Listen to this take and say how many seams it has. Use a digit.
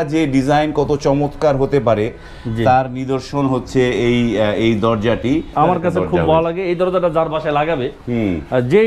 1